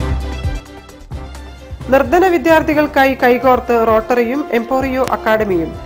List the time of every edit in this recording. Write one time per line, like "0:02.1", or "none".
none